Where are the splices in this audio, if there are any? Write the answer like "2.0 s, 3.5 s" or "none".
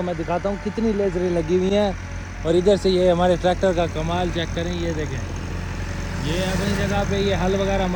none

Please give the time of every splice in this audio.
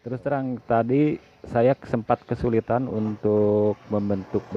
none

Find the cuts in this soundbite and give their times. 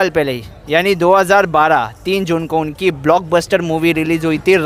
none

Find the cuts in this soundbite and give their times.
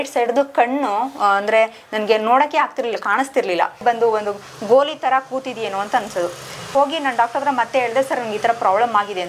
none

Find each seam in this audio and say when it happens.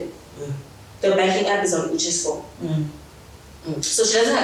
none

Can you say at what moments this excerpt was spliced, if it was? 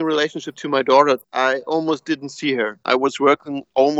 1.3 s, 2.8 s

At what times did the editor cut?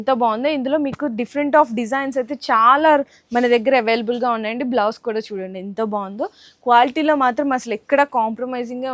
none

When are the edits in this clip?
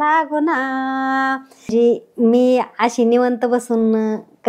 1.7 s

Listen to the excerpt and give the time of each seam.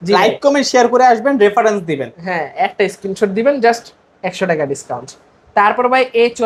none

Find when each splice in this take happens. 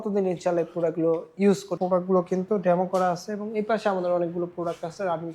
1.8 s

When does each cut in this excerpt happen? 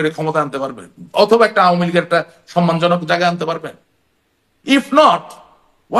none

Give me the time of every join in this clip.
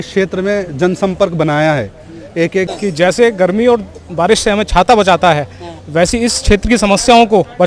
2.7 s

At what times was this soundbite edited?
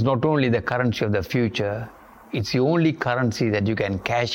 none

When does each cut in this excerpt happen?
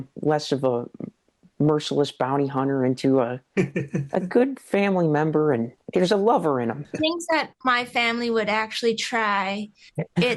6.9 s

